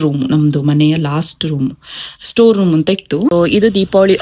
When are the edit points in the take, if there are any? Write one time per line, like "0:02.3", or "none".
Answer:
0:03.3